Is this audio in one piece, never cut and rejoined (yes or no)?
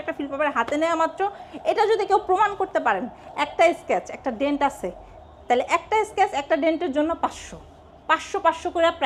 yes